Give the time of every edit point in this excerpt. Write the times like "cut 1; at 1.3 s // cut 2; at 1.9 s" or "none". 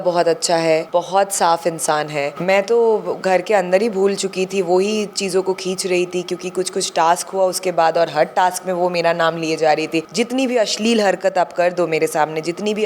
cut 1; at 0.9 s // cut 2; at 2.4 s // cut 3; at 10.1 s